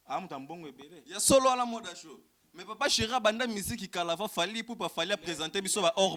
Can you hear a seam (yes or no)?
no